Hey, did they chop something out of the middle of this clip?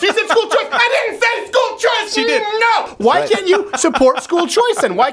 yes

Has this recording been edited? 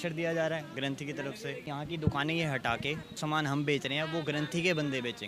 yes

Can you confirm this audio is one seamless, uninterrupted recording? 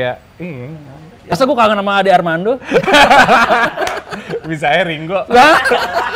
no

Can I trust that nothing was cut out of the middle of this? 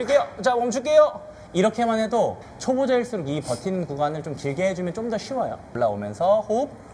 no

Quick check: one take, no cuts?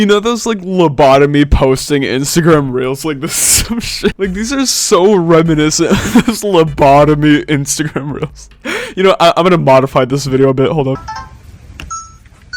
yes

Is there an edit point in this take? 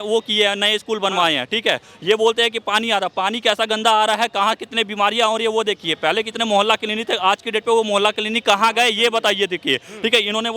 no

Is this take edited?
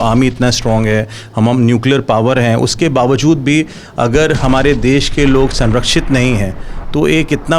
no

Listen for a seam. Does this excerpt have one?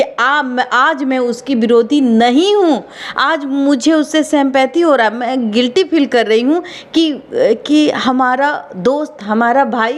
no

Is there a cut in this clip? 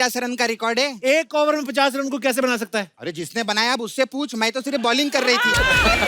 yes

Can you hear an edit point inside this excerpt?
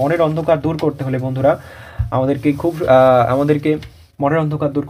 no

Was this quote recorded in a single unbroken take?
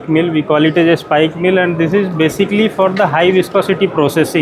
yes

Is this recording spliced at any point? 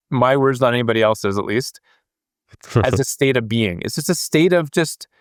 no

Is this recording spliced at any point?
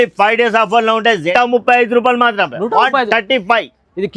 yes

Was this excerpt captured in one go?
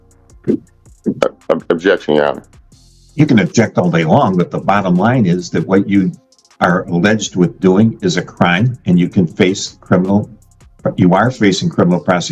yes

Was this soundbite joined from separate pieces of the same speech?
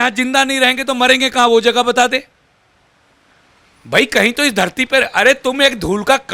no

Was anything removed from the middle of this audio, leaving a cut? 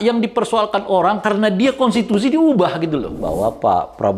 yes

